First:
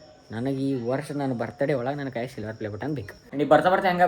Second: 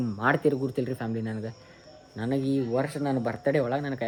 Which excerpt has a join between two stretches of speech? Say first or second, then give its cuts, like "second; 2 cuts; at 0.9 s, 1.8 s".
first; 1 cut; at 3.2 s